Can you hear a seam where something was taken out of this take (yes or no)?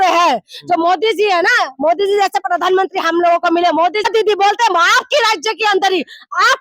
yes